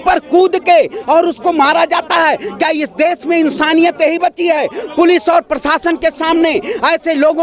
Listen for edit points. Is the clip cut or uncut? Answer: uncut